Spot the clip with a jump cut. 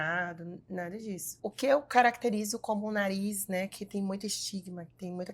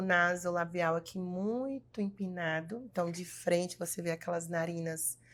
first; 1 cut; at 1.3 s

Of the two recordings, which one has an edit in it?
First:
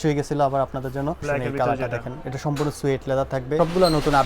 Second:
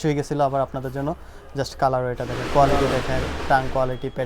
first; 2 cuts; at 1.2 s, 3.6 s

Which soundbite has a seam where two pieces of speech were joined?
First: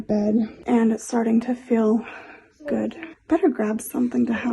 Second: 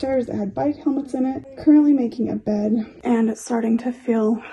first; 1 cut; at 3.1 s

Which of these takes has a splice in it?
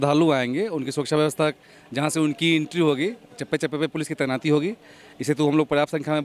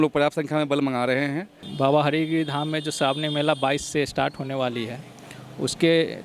second; 1 cut; at 1.7 s

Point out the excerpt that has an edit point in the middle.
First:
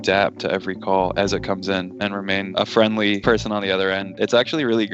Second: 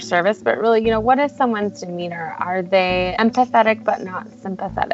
first; 2 cuts; at 2.0 s, 4.1 s

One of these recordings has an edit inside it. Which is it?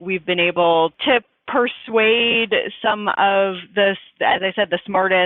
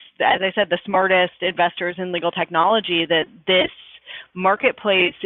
first; 1 cut; at 1.0 s

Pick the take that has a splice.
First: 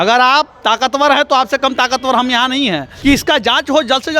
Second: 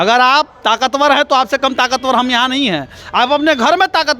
first; 1 cut; at 2.9 s

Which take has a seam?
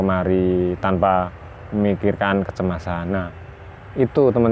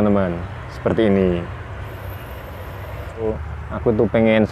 second; 1 cut; at 3.3 s

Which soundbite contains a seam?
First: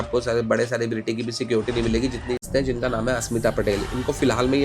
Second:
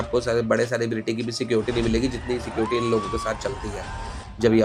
first; 1 cut; at 2.4 s

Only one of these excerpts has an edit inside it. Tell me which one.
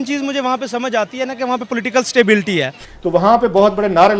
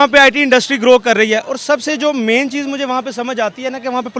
first; 1 cut; at 2.8 s

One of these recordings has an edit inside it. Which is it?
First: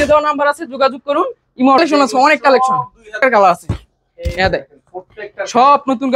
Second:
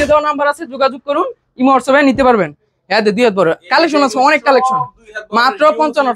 first; 2 cuts; at 1.8 s, 3.1 s

